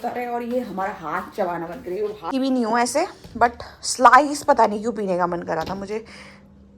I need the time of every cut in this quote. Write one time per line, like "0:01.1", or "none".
0:02.3